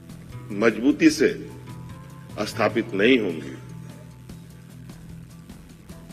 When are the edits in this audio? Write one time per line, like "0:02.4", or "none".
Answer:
0:04.1